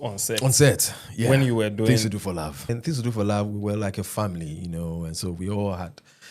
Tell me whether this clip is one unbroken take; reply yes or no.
no